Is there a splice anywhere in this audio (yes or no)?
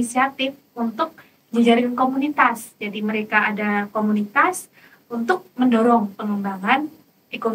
no